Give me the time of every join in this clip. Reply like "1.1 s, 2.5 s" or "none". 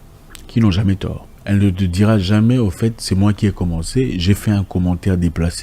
1.3 s

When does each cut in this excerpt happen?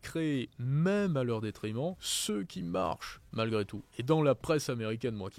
2.1 s

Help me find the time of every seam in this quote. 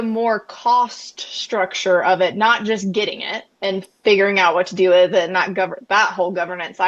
none

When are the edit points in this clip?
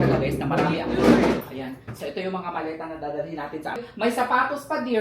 1.5 s, 3.9 s

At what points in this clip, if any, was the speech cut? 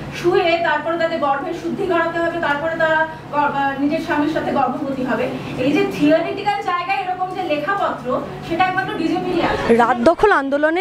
none

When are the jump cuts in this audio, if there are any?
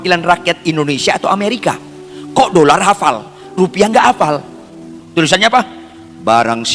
4.9 s

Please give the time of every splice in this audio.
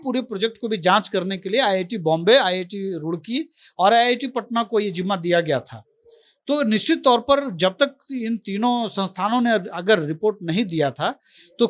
none

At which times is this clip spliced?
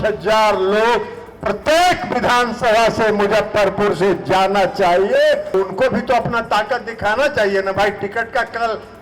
5.5 s

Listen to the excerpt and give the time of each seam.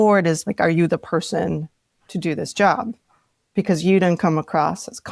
none

